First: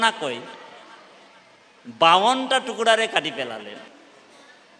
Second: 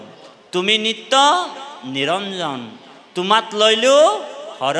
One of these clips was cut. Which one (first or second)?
first